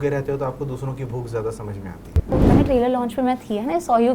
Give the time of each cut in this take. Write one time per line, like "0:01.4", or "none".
0:02.3